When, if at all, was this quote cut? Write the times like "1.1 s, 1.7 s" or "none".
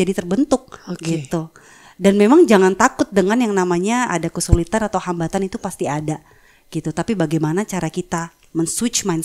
none